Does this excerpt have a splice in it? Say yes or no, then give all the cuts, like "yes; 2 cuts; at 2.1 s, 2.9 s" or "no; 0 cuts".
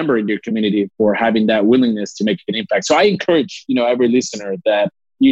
no; 0 cuts